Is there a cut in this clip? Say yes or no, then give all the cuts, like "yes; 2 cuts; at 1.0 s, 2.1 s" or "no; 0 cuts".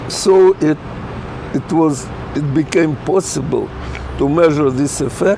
no; 0 cuts